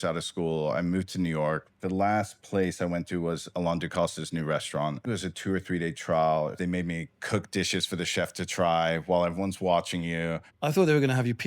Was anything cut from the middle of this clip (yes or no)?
yes